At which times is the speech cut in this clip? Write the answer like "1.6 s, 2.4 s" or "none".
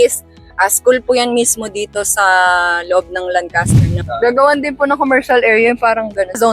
3.8 s